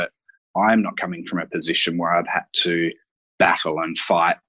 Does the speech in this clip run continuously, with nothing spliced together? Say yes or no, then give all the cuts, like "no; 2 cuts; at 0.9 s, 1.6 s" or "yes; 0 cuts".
yes; 0 cuts